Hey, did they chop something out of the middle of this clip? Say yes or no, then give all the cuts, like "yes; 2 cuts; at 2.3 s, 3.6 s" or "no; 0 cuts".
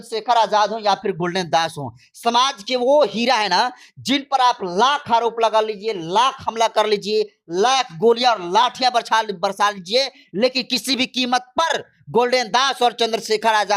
no; 0 cuts